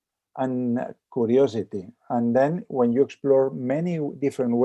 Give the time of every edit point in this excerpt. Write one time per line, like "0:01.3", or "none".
none